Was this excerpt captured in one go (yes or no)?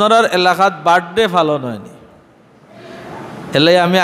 no